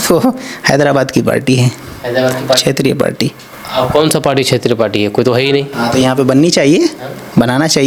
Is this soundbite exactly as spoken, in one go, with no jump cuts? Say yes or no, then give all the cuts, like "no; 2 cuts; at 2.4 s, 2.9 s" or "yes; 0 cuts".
yes; 0 cuts